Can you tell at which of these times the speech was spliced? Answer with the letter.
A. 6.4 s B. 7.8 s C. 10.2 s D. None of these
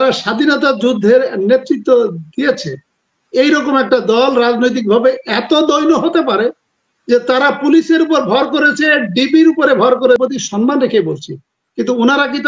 C